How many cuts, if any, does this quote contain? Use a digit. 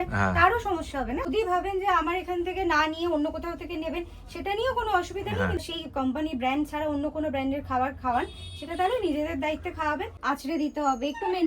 3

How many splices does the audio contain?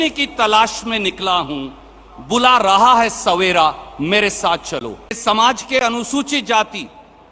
1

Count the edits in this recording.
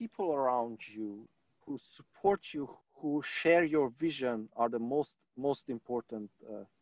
2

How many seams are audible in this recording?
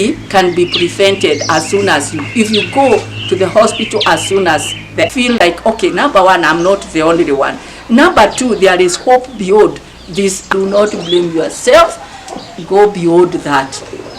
2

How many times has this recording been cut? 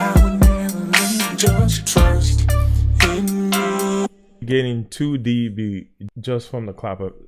2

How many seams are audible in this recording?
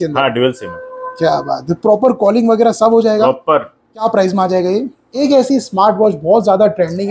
2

